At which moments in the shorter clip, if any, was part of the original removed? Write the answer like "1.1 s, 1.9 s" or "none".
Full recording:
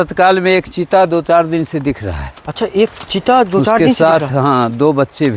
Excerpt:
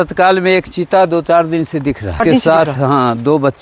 2.2 s